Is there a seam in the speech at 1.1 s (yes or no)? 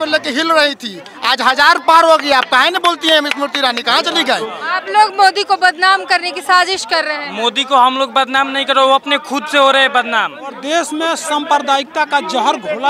no